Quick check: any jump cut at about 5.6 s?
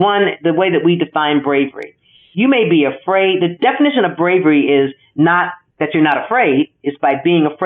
yes; 1 cut; at 5.6 s

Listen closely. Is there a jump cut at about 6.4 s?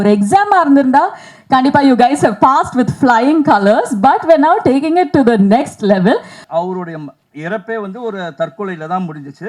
yes; 1 cut; at 6.4 s

